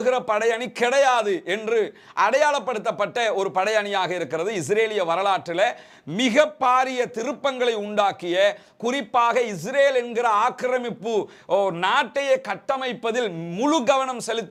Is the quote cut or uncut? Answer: uncut